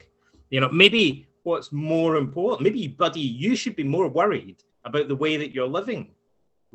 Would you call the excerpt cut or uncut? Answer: uncut